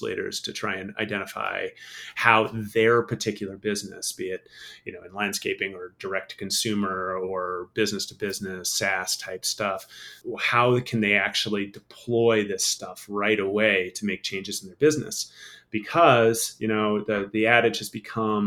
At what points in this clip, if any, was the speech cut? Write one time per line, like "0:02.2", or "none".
none